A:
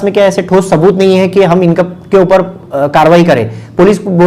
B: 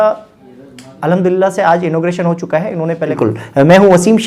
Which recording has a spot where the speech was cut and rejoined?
B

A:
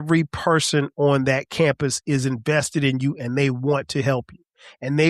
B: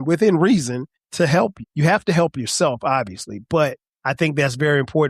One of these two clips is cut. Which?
B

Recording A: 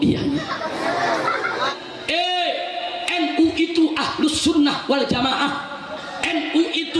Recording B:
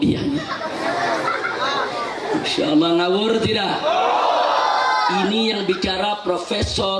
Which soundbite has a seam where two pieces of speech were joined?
A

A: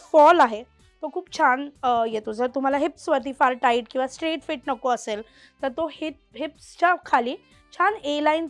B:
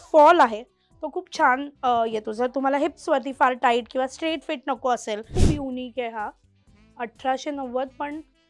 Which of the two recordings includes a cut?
B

